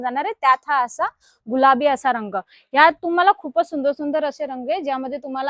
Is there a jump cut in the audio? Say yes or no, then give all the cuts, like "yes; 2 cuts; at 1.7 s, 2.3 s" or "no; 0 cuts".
no; 0 cuts